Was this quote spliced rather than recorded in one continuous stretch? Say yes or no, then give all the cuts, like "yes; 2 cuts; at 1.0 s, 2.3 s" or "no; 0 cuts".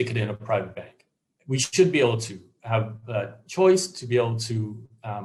no; 0 cuts